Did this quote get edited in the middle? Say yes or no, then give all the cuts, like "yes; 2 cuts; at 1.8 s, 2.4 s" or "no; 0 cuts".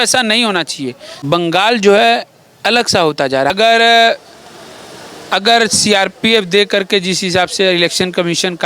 yes; 2 cuts; at 1.1 s, 3.5 s